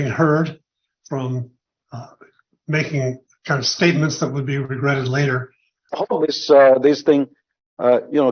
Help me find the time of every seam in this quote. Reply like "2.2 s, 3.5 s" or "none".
5.9 s

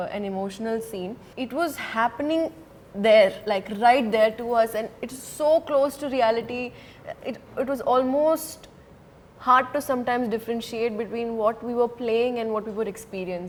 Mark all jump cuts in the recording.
none

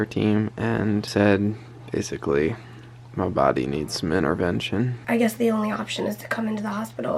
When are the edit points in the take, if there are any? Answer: 1.1 s, 5.0 s

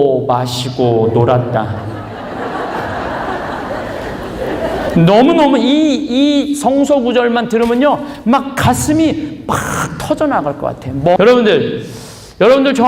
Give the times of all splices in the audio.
11.2 s

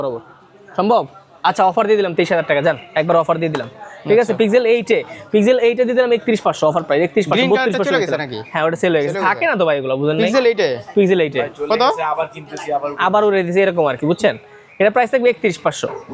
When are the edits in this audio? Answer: none

